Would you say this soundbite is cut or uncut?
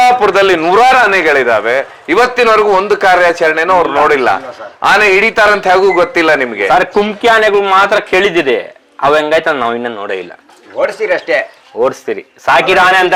uncut